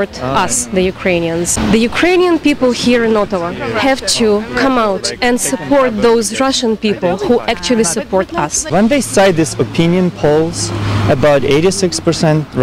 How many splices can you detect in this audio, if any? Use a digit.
2